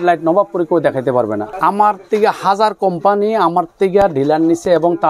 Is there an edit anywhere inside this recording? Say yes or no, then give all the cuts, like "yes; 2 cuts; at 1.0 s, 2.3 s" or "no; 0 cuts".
yes; 1 cut; at 1.5 s